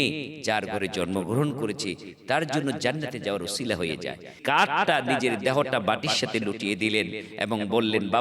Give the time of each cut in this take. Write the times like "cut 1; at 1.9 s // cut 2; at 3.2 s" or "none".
cut 1; at 4.4 s